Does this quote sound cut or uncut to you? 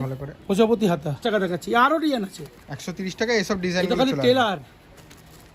cut